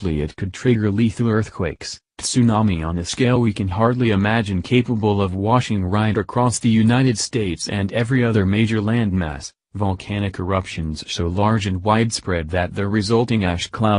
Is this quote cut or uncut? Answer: cut